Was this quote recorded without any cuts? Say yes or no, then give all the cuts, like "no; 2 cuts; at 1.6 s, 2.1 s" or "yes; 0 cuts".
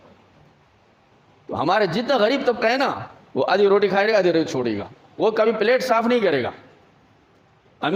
yes; 0 cuts